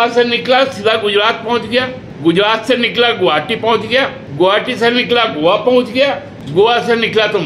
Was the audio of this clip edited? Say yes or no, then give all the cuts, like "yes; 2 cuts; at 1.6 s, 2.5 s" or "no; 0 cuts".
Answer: yes; 3 cuts; at 2.0 s, 4.2 s, 6.3 s